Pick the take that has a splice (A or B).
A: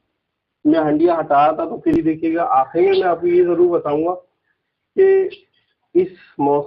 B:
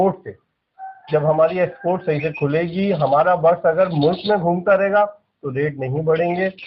A